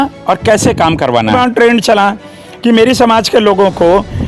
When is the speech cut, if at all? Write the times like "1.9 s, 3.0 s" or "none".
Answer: 1.3 s